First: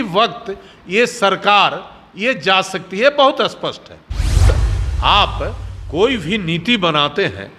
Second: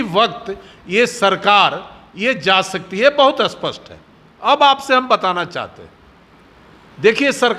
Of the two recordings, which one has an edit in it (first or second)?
first